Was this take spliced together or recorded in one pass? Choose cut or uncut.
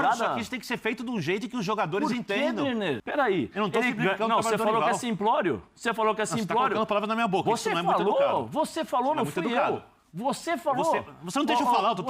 cut